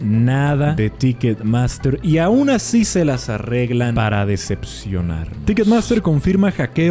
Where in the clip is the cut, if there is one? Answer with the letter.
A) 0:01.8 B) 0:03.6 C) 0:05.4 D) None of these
C